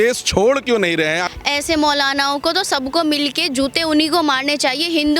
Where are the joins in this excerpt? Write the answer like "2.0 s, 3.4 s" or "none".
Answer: 1.3 s